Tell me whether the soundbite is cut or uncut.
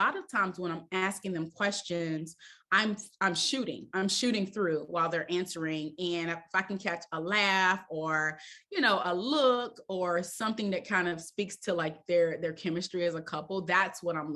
uncut